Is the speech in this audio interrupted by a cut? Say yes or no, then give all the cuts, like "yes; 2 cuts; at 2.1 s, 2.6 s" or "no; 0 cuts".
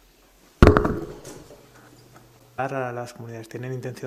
no; 0 cuts